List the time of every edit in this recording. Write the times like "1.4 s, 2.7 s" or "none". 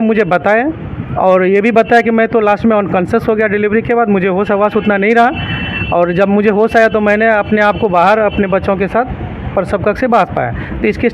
none